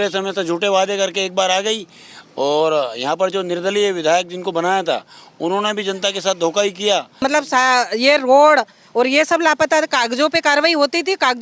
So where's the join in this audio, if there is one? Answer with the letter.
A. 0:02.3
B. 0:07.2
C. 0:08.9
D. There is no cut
B